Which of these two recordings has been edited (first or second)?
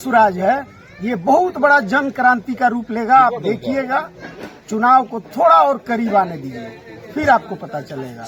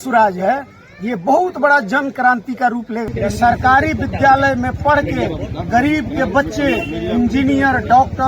second